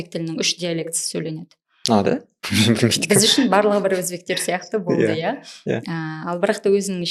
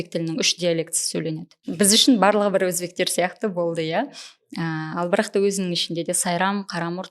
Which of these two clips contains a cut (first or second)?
second